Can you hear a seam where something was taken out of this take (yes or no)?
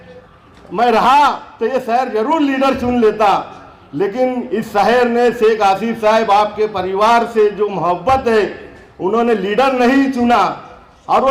no